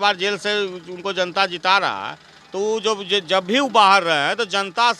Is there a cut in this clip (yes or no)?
no